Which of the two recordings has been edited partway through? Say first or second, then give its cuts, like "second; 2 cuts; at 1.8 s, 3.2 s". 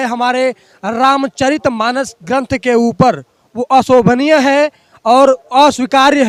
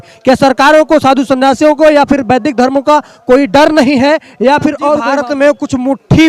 second; 1 cut; at 5.0 s